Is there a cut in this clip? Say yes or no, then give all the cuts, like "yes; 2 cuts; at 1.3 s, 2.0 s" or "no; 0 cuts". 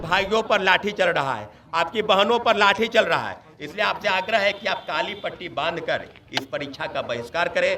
no; 0 cuts